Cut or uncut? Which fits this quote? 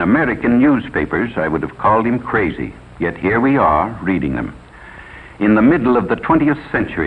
cut